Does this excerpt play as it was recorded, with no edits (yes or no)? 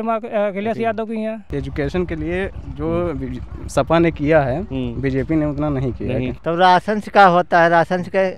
no